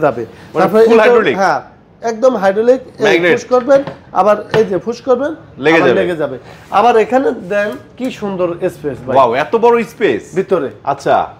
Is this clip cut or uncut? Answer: uncut